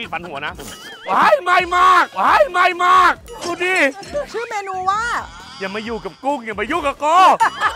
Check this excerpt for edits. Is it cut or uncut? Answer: cut